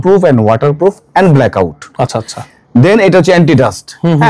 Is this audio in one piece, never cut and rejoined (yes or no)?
yes